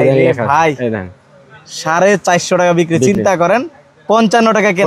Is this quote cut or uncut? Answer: uncut